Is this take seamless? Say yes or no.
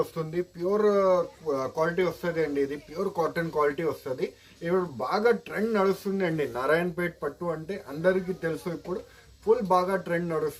yes